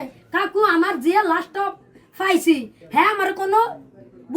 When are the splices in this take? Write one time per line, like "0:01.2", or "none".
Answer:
0:02.8